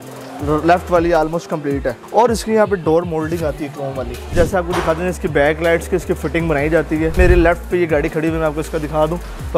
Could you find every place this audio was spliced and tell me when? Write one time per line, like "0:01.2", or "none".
0:02.0
0:04.2
0:07.2